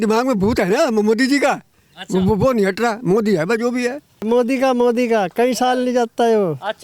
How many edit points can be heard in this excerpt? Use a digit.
1